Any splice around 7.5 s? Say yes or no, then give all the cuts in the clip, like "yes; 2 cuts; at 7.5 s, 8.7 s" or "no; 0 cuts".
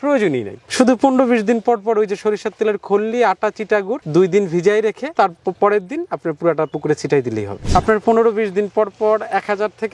yes; 1 cut; at 7.5 s